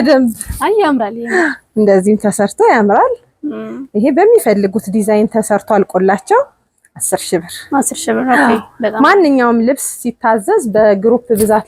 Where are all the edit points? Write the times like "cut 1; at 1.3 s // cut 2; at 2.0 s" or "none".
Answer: none